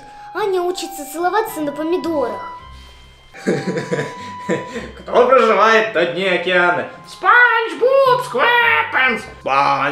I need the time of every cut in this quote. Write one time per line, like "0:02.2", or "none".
0:03.4